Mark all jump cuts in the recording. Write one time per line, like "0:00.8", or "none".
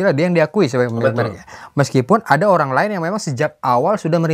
none